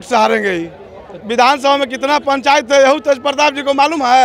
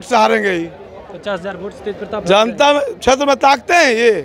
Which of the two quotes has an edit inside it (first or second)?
first